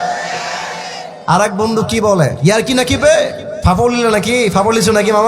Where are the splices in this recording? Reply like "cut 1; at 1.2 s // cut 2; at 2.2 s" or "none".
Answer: cut 1; at 2.3 s // cut 2; at 3.5 s